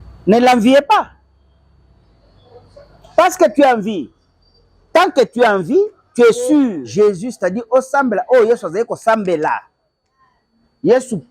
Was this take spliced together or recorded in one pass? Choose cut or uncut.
cut